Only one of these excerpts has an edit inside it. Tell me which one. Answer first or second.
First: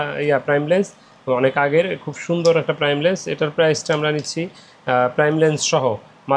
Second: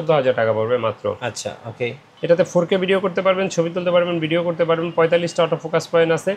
second